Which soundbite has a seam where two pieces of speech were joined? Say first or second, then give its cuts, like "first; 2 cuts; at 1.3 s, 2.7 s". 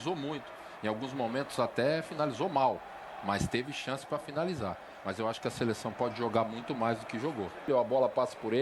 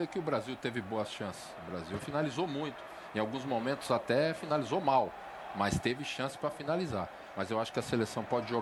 first; 1 cut; at 7.7 s